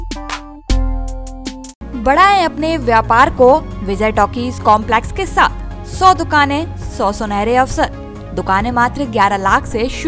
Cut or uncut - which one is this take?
uncut